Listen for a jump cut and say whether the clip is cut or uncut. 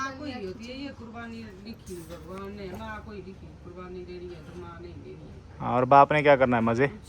uncut